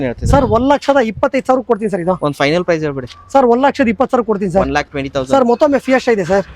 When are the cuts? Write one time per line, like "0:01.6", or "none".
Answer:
none